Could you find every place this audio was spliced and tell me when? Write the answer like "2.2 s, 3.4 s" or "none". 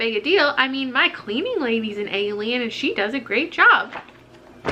none